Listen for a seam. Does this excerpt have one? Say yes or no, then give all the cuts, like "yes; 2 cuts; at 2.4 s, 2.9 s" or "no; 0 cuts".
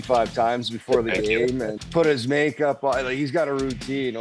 yes; 1 cut; at 1.8 s